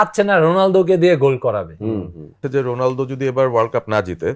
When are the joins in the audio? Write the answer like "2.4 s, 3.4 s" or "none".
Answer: 2.4 s